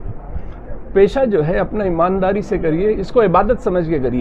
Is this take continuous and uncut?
yes; 0 cuts

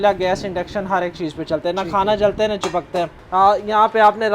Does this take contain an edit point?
yes; 1 cut; at 3.2 s

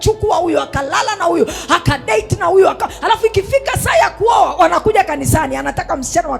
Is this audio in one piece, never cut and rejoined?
yes; 0 cuts

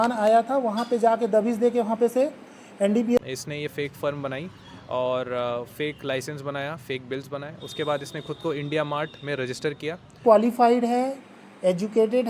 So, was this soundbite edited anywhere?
yes; 2 cuts; at 3.2 s, 10.2 s

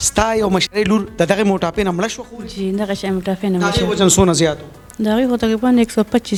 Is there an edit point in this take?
no; 0 cuts

